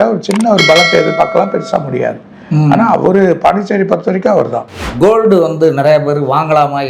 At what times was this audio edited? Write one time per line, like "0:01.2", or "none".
0:04.7

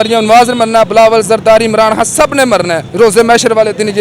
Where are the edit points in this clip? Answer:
0:02.9

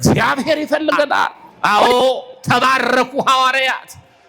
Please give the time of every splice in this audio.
0:01.5

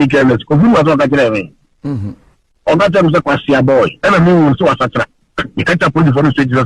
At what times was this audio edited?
0:04.0

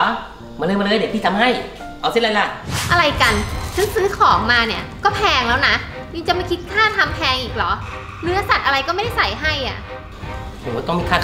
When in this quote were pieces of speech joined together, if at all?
0:02.8

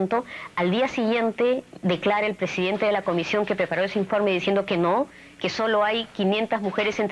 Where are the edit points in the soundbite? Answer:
0:01.0

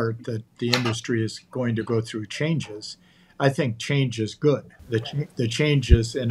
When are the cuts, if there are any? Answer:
0:04.7

